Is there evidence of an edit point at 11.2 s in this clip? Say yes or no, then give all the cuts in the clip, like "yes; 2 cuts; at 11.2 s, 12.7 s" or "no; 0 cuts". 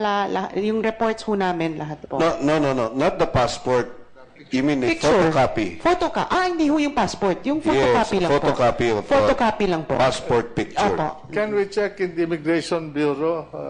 no; 1 cut; at 3.5 s